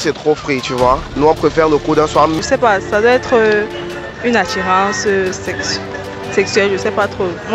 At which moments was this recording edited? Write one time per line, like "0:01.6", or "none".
0:01.1
0:02.3